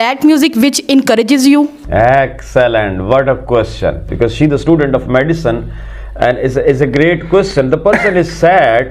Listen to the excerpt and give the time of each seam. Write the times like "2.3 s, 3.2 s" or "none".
none